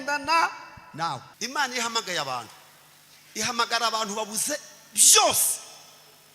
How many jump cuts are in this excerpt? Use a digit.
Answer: 1